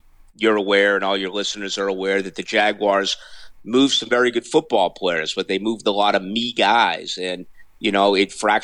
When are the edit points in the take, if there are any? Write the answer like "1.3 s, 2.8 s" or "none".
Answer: none